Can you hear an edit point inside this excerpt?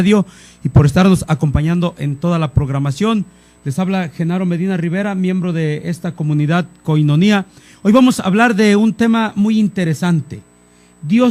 yes; 1 cut; at 8.2 s

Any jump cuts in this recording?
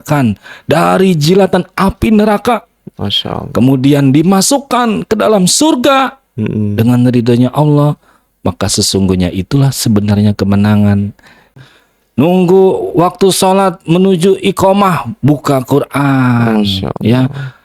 yes; 1 cut; at 11.6 s

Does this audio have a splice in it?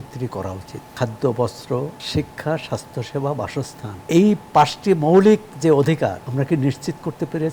yes; 4 cuts; at 0.9 s, 2.0 s, 3.9 s, 6.2 s

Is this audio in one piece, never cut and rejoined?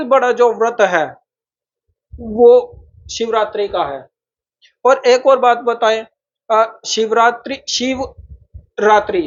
yes; 0 cuts

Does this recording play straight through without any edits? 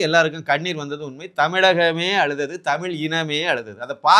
yes; 0 cuts

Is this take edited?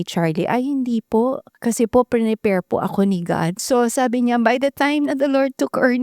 yes; 2 cuts; at 1.5 s, 3.5 s

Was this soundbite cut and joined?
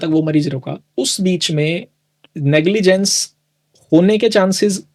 no; 0 cuts

